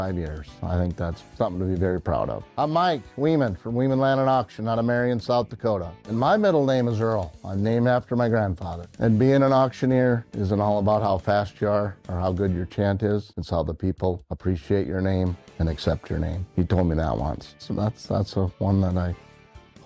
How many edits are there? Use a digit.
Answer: 1